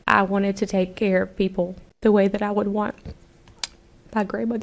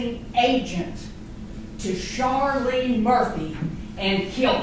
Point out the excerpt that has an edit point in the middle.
first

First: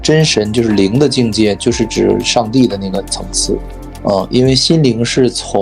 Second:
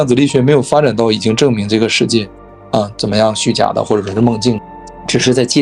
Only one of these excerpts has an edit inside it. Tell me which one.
second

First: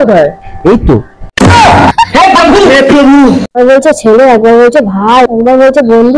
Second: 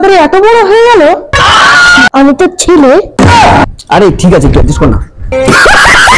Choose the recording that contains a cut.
first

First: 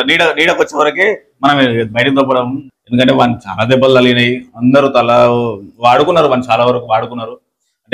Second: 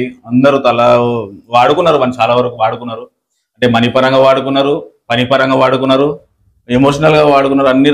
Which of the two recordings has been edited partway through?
first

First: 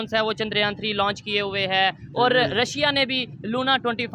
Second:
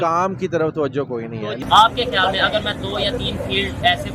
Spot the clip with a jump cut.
second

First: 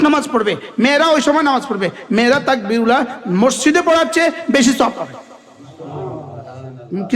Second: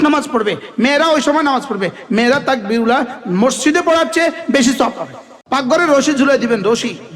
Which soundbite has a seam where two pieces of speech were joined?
second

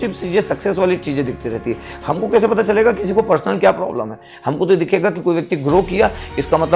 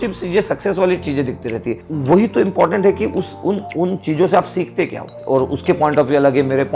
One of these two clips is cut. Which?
second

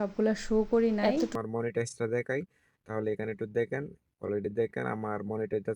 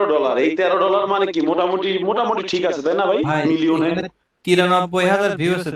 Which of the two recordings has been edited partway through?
first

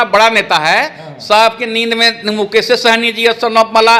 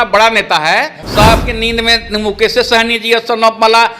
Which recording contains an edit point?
second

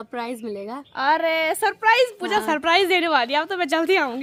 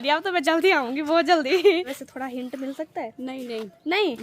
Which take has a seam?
second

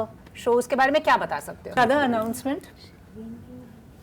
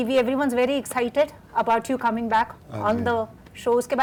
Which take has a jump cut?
first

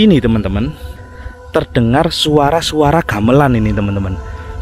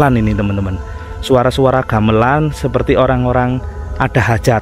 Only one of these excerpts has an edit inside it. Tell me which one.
first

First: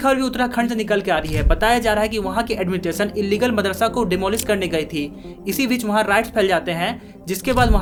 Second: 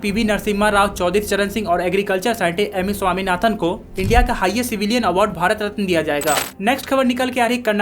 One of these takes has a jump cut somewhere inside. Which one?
second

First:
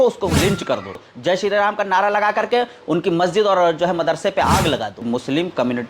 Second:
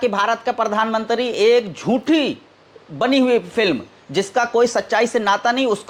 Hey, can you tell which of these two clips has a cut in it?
first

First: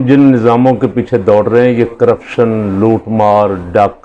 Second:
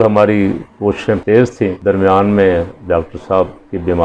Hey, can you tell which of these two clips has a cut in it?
second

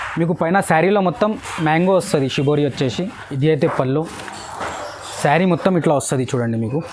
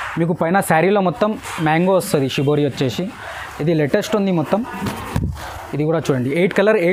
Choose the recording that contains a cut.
first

